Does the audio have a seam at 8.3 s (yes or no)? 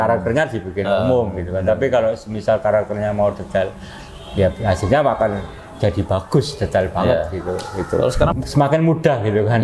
yes